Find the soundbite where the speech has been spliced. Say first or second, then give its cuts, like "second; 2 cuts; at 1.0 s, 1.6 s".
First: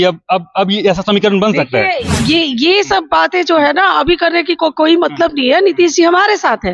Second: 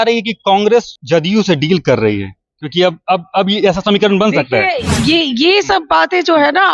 second; 1 cut; at 1.0 s